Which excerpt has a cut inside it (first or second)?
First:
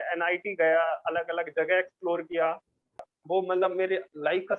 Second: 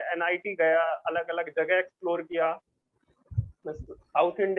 first